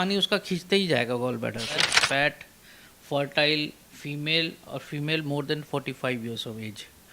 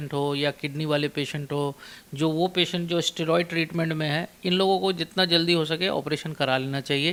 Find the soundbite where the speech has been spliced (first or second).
first